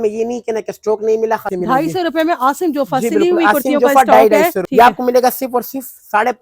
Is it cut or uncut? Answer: cut